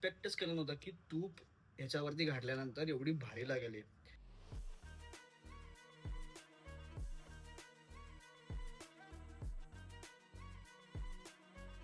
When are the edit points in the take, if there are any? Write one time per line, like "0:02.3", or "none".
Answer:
0:04.3